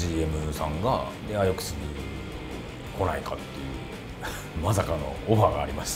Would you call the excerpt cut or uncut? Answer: cut